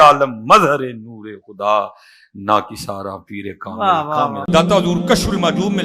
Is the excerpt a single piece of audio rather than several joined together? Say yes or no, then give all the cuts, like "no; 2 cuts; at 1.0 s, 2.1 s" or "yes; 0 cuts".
no; 1 cut; at 4.4 s